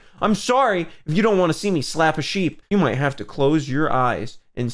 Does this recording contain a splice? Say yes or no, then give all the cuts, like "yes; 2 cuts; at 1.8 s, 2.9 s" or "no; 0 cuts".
yes; 1 cut; at 2.6 s